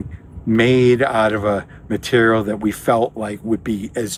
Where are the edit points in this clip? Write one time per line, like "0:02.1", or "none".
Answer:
none